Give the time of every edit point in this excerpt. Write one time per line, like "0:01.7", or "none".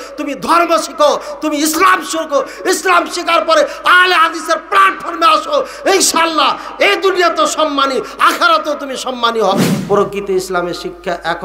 0:09.7